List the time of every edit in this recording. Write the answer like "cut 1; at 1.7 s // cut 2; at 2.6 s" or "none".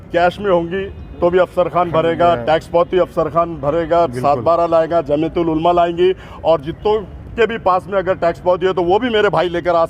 none